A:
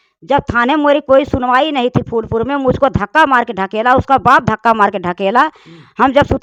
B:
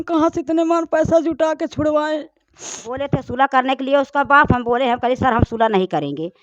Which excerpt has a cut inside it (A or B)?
B